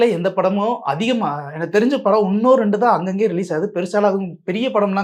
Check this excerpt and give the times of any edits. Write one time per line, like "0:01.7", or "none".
none